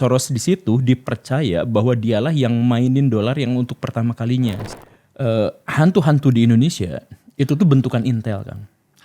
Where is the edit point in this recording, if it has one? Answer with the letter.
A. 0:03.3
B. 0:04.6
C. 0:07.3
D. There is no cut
B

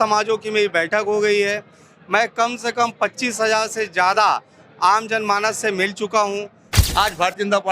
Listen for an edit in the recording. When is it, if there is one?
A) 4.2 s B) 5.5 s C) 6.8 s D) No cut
C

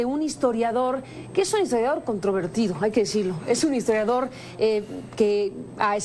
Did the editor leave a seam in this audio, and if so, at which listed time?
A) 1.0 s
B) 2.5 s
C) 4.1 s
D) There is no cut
D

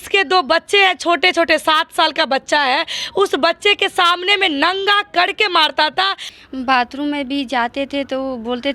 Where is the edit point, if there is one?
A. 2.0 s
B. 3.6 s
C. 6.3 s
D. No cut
C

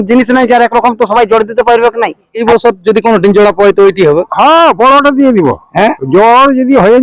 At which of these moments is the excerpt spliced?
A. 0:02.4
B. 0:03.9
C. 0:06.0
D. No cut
A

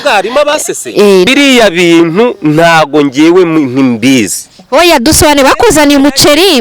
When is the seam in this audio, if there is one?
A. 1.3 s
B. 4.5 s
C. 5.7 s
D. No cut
A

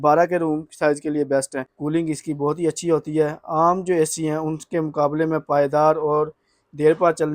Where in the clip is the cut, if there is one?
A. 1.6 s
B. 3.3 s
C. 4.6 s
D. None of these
A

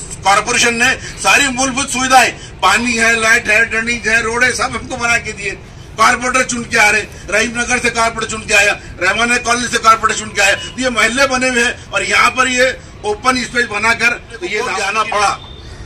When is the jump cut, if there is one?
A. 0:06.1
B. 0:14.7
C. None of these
B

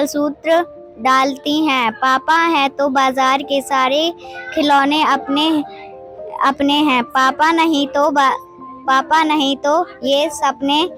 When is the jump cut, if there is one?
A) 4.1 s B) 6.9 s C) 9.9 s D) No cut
D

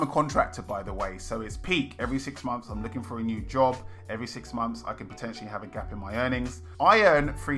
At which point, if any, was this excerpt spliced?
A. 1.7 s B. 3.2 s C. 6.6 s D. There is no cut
C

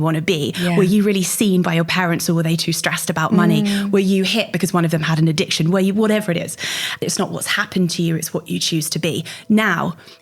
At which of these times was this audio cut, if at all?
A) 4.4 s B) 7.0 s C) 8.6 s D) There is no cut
B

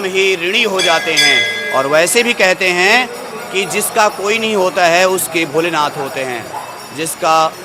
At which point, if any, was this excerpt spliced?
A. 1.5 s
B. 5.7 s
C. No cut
C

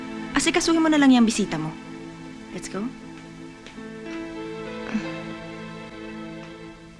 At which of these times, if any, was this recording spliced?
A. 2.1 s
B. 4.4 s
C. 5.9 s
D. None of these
D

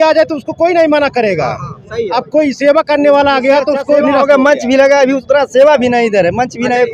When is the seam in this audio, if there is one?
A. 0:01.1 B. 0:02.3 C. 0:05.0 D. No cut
D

